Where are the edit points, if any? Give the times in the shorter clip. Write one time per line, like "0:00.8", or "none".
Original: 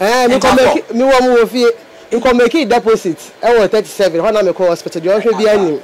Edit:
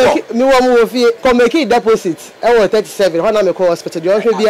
0:01.2

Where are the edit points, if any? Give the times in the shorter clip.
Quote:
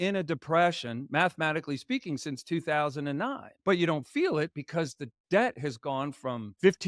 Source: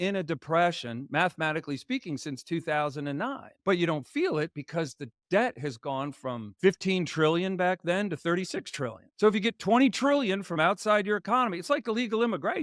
none

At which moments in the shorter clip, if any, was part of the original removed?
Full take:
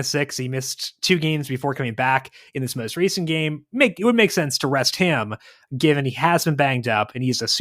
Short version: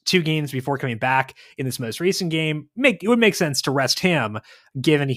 none

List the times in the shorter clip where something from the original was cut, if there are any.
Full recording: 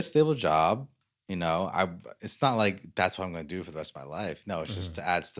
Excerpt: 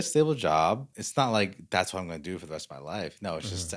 0:01.0

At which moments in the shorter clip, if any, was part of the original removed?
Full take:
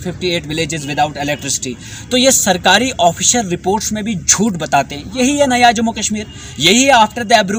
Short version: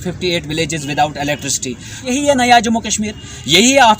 0:01.9

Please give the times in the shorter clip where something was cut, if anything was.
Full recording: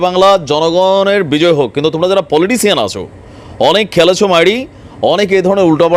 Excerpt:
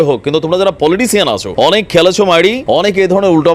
0:01.4
0:02.6

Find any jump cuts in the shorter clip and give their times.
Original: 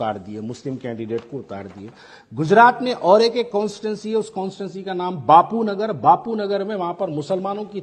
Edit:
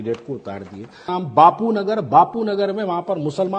0:01.1

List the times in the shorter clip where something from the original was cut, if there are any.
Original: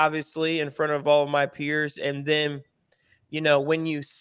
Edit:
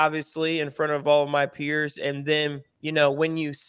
0:02.7

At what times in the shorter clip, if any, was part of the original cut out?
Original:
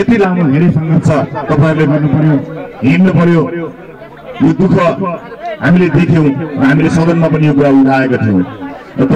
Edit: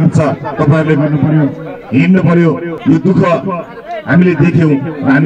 0:02.7

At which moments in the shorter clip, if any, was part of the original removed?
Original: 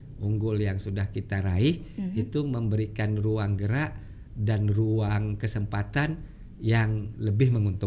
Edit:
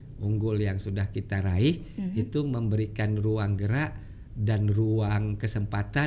none

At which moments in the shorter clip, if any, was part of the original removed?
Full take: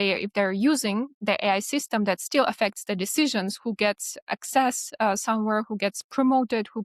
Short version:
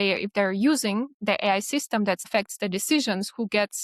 0:02.3

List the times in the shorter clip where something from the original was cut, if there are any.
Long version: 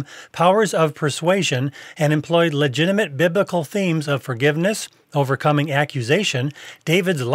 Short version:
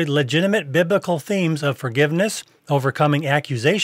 none

